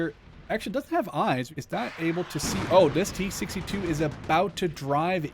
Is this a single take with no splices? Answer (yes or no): no